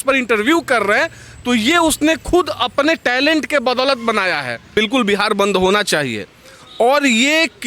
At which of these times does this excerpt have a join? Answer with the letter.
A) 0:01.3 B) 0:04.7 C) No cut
B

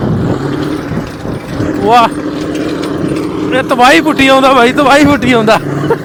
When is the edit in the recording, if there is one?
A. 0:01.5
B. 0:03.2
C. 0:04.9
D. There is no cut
D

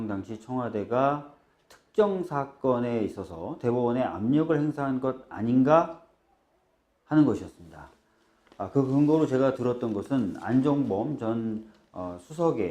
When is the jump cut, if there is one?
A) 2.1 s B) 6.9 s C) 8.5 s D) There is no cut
A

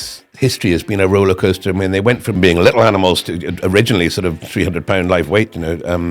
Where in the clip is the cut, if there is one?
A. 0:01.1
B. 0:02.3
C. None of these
B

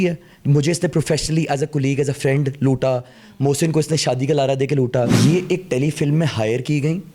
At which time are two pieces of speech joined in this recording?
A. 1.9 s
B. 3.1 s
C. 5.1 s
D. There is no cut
C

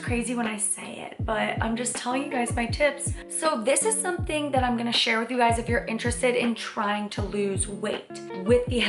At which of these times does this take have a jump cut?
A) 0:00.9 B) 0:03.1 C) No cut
C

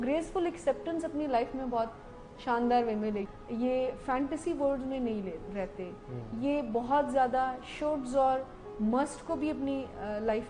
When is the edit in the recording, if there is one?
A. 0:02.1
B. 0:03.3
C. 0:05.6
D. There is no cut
B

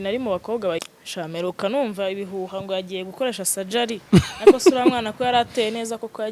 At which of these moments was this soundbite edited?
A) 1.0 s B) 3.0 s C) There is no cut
A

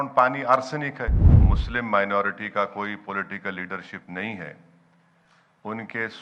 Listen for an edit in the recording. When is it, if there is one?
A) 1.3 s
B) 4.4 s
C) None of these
A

